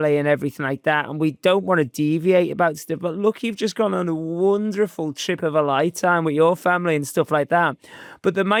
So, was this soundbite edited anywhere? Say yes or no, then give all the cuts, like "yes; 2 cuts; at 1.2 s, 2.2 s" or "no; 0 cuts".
no; 0 cuts